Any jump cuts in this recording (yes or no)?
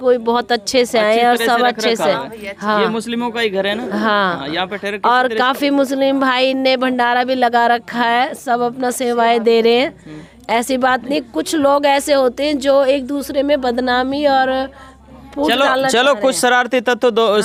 no